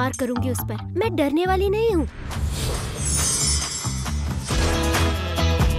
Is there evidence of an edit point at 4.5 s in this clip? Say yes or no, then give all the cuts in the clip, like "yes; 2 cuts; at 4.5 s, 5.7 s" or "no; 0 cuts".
yes; 1 cut; at 4.5 s